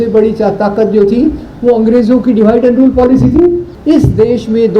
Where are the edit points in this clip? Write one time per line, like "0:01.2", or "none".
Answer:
0:03.7